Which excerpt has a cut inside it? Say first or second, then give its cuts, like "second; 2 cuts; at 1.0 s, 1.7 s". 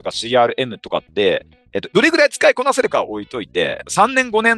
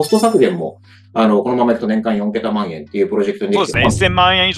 first; 2 cuts; at 1.7 s, 3.8 s